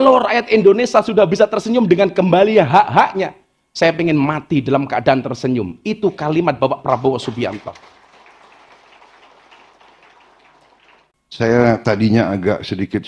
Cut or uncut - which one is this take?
cut